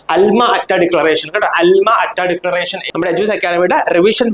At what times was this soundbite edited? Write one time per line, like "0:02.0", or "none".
0:02.8

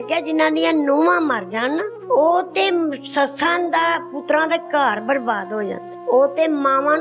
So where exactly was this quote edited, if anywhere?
0:01.9
0:05.9

